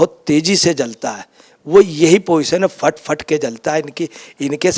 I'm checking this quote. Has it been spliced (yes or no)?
no